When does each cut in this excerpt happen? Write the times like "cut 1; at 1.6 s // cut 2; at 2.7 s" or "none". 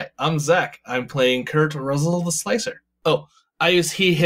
cut 1; at 3.0 s